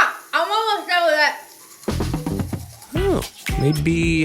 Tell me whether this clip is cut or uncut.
uncut